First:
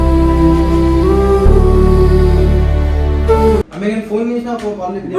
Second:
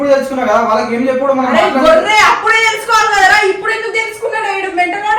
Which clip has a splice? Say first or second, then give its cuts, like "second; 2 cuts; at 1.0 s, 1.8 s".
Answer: first; 1 cut; at 3.7 s